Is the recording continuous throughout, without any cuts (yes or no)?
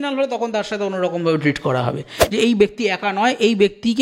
no